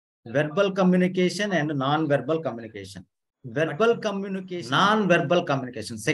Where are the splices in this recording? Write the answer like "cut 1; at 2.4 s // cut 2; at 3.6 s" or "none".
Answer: cut 1; at 4.5 s